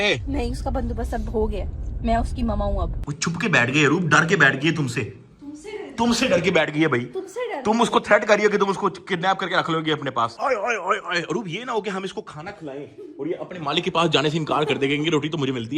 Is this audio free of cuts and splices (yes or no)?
no